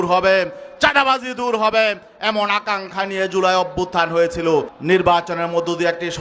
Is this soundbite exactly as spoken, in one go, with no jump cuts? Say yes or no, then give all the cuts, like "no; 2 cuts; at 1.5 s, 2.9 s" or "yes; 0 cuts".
no; 1 cut; at 4.7 s